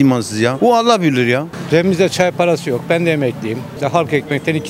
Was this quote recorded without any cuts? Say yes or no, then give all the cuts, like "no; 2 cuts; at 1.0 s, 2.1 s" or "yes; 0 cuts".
no; 2 cuts; at 1.5 s, 3.7 s